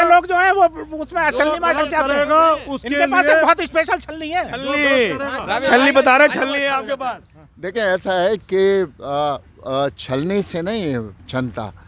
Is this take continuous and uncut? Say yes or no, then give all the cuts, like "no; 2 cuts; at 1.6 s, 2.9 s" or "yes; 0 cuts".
yes; 0 cuts